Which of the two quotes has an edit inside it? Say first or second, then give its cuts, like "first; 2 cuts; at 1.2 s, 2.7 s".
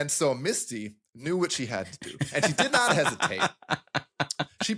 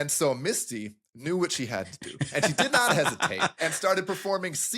second; 1 cut; at 3.5 s